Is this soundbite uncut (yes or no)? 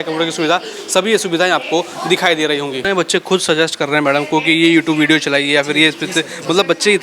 yes